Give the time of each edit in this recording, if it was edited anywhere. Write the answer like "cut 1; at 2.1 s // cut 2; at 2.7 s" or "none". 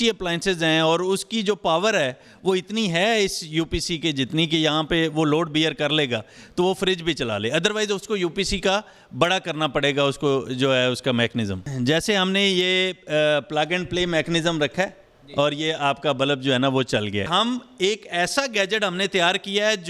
cut 1; at 11.6 s // cut 2; at 17.3 s